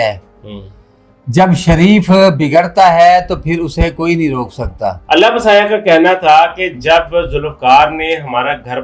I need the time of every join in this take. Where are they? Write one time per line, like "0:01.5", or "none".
0:05.0

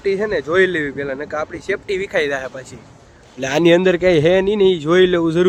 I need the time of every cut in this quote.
none

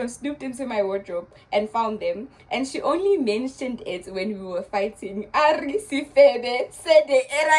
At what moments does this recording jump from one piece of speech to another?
none

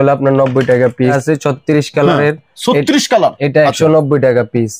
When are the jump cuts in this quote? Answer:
0:01.2

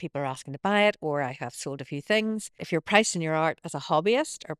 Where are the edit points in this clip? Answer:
0:02.6

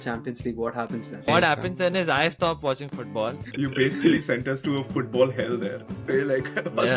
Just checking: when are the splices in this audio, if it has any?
0:01.3
0:03.4

